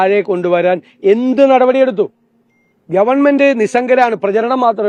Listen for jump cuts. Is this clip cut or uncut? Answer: uncut